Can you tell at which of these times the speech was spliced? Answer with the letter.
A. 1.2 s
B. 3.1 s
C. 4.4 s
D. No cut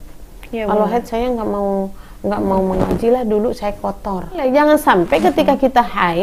C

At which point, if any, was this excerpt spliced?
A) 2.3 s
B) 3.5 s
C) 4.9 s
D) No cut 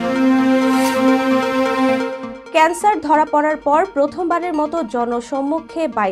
A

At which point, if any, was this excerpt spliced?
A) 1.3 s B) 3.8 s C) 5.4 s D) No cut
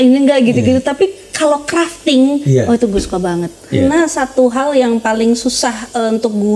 B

